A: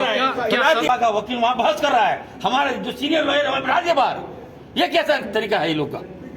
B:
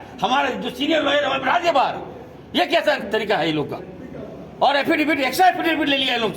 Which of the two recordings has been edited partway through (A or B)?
A